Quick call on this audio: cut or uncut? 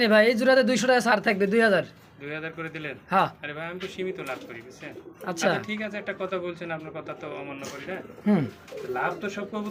uncut